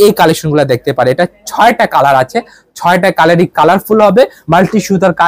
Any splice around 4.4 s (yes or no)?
yes